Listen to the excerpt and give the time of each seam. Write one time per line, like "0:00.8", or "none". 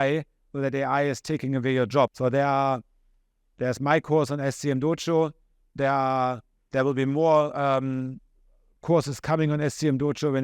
0:02.1